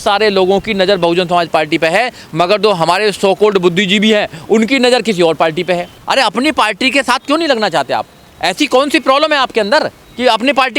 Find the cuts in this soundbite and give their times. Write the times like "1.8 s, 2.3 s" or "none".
6.0 s